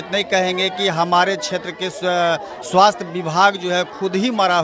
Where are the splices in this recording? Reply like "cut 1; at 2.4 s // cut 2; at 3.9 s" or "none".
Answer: none